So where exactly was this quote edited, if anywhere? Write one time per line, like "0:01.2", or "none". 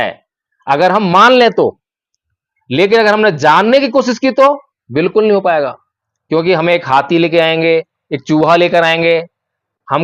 none